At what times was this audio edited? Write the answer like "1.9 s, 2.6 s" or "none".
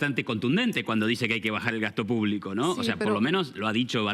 none